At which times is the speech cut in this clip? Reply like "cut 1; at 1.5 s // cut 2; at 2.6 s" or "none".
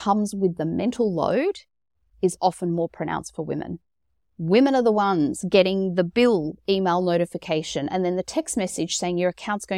none